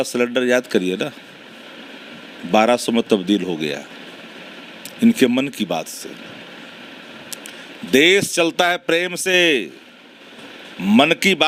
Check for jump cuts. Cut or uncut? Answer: uncut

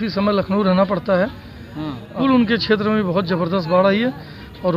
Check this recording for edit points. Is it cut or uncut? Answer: cut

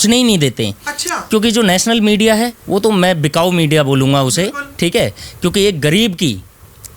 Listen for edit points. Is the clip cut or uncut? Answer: uncut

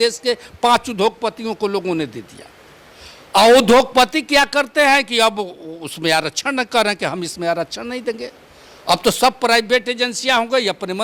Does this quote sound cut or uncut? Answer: uncut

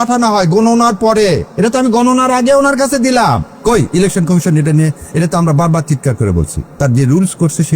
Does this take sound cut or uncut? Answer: cut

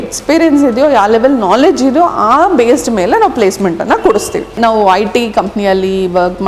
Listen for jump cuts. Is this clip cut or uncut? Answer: cut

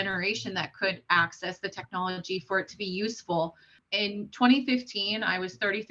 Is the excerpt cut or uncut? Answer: cut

